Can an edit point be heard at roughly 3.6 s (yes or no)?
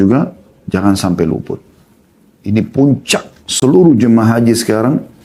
no